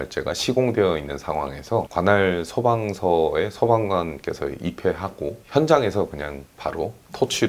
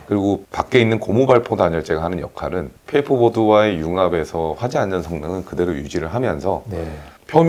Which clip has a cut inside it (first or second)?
second